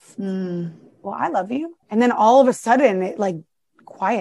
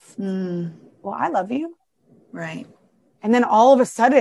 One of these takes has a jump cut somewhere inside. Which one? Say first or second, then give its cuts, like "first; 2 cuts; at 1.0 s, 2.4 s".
first; 1 cut; at 1.8 s